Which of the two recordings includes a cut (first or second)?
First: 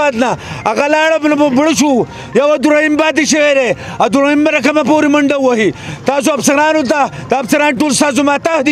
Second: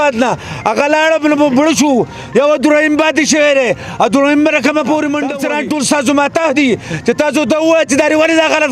second